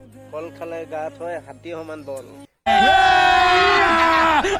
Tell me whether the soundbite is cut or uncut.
uncut